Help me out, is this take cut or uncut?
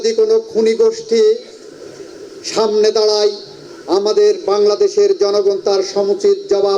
uncut